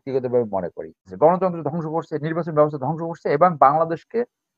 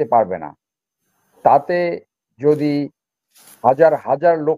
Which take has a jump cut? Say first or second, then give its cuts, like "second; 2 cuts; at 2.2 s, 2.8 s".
first; 1 cut; at 1.1 s